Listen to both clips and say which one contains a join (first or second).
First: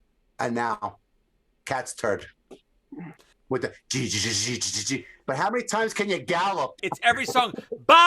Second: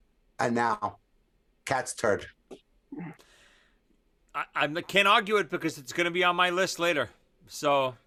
first